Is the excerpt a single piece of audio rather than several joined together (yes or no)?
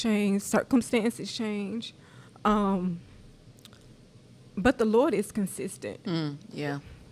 yes